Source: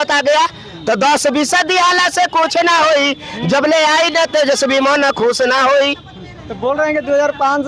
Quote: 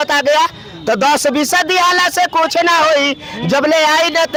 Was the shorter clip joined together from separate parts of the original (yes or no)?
no